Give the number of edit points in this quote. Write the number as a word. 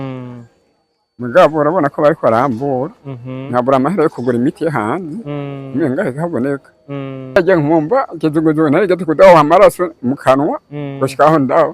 one